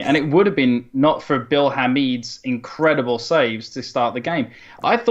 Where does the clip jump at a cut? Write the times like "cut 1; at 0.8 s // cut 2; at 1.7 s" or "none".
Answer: cut 1; at 2.0 s